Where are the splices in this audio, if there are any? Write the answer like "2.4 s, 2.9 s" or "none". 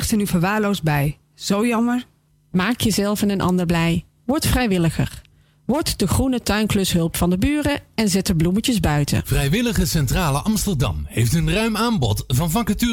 9.3 s